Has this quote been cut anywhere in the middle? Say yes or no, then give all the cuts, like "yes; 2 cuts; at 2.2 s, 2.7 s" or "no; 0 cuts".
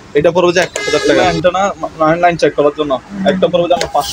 yes; 1 cut; at 1.2 s